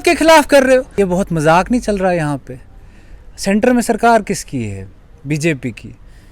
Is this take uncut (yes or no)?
no